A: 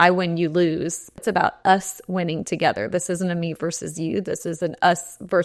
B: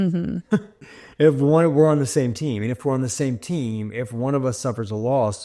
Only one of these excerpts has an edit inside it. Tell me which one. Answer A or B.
A